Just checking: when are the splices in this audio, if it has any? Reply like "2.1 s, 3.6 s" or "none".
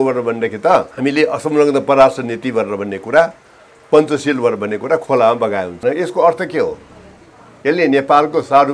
0.9 s, 5.7 s

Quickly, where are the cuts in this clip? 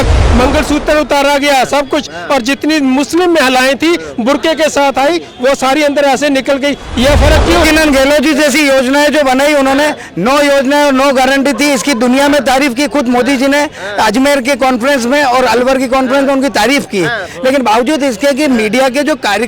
7.6 s

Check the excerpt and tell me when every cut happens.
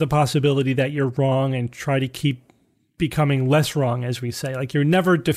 none

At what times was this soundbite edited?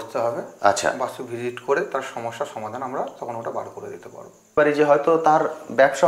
4.6 s

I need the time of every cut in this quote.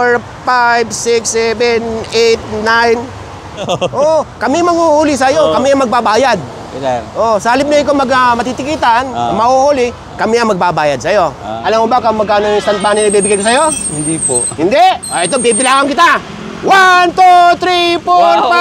3.6 s, 11.5 s

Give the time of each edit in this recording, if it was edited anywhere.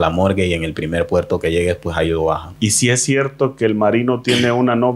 2.5 s

